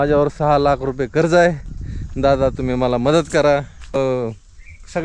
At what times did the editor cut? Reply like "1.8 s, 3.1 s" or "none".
3.9 s